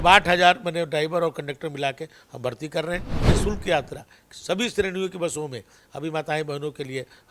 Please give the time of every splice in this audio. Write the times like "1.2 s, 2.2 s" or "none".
3.2 s